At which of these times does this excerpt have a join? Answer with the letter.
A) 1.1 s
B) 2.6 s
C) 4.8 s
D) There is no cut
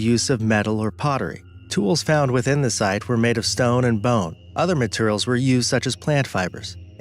B